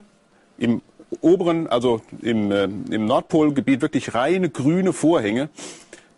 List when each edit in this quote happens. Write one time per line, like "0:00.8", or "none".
0:05.0